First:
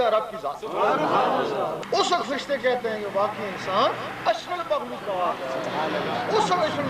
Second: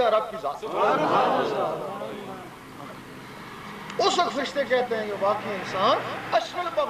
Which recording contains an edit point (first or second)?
first